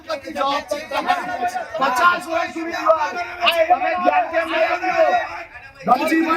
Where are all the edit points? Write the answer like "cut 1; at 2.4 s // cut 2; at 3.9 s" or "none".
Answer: cut 1; at 1.7 s